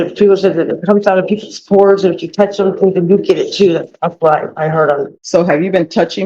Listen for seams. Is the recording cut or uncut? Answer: cut